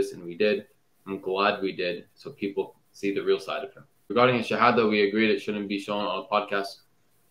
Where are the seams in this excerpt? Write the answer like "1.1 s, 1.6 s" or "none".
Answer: 4.1 s